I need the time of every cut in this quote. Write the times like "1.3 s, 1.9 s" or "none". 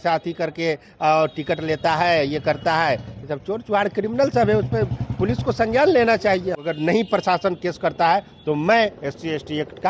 6.6 s